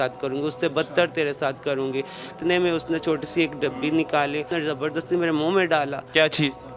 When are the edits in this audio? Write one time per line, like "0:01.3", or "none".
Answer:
0:02.3
0:04.5